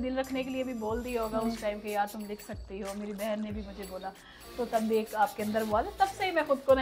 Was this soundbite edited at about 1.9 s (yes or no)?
no